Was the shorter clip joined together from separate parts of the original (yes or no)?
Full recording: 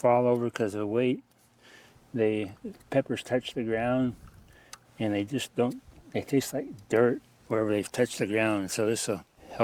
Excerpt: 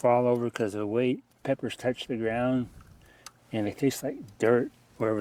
yes